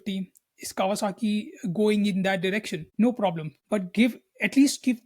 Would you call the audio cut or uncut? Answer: cut